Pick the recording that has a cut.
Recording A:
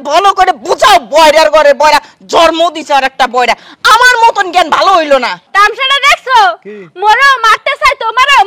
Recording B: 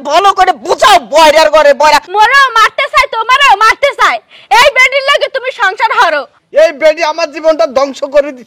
B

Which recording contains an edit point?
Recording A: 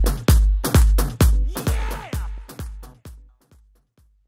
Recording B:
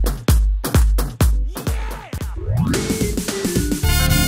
B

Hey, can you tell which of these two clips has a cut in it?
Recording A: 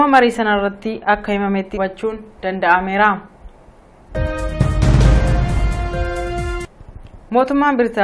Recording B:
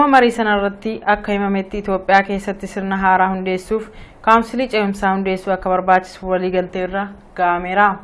B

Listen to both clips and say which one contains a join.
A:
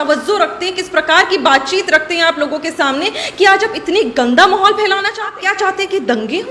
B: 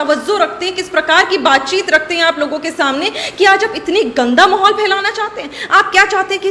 A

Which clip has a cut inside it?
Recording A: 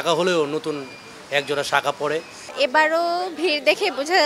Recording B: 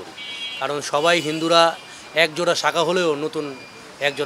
A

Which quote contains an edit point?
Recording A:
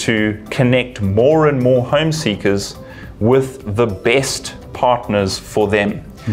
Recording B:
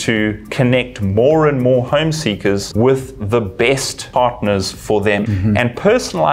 B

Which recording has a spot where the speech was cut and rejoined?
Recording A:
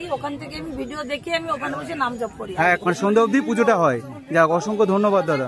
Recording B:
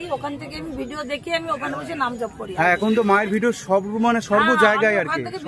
A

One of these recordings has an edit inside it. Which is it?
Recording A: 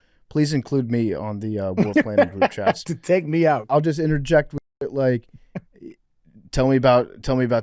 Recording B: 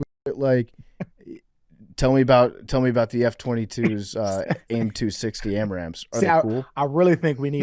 A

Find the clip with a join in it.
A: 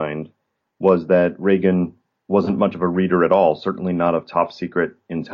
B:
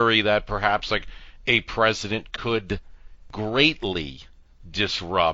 B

